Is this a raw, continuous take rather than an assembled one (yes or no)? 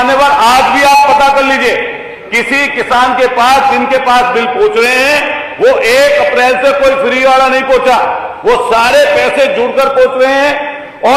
yes